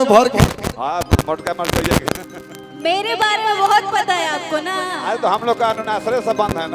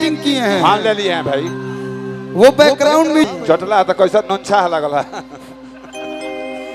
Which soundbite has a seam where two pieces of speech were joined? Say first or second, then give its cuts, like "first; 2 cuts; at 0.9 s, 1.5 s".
second; 1 cut; at 3.3 s